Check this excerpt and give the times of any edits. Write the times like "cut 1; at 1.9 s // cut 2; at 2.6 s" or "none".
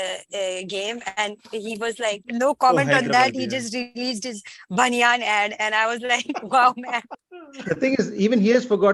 none